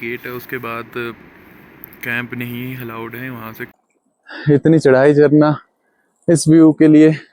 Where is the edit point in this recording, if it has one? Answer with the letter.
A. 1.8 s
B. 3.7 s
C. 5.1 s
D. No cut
B